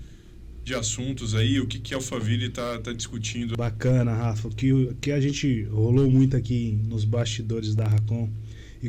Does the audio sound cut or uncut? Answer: cut